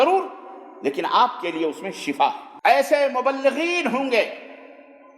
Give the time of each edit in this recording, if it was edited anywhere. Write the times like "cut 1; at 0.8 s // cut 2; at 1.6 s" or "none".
cut 1; at 2.5 s